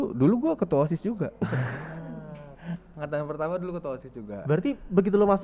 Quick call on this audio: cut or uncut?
uncut